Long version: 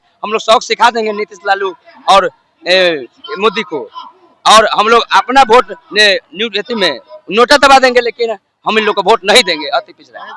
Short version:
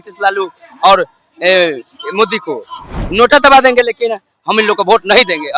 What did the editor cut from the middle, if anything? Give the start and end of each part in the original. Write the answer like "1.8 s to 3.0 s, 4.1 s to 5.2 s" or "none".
4.2 s to 7.1 s